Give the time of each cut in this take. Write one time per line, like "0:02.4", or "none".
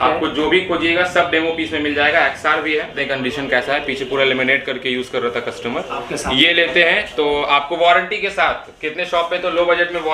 0:02.9